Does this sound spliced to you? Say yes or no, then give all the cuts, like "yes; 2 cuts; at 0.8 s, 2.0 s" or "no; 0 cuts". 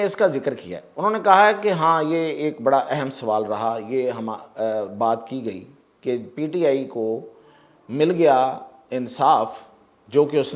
no; 0 cuts